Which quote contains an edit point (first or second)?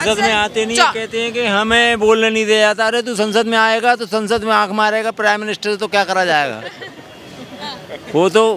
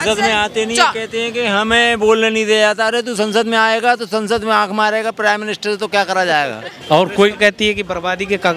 second